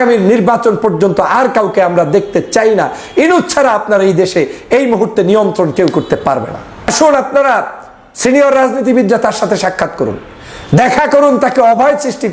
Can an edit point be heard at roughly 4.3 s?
no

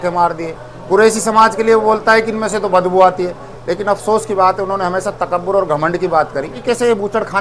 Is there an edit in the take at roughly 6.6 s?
yes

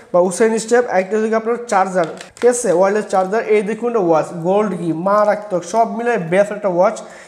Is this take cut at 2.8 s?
no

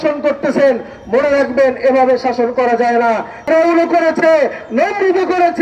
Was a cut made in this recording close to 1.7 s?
no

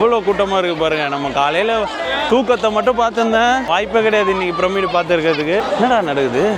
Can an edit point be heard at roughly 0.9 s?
no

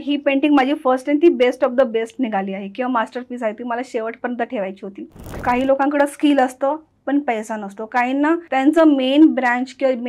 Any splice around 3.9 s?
no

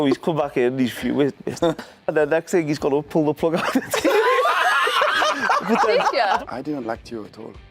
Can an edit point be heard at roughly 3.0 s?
no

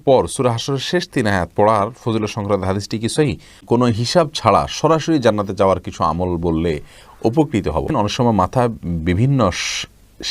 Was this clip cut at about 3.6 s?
yes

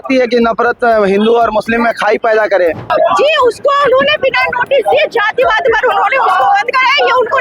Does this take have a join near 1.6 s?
no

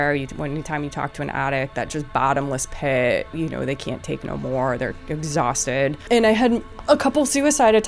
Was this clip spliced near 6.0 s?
yes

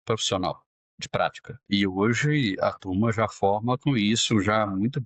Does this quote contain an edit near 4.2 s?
no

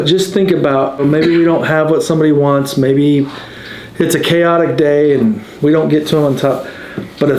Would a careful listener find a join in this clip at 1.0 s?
yes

